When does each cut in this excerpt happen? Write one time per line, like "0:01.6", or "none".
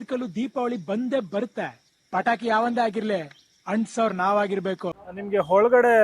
0:04.9